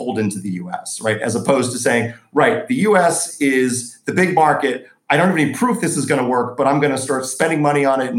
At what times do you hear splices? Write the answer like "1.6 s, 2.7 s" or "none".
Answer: none